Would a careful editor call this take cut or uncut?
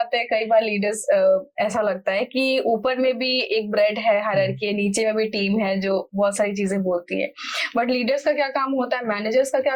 uncut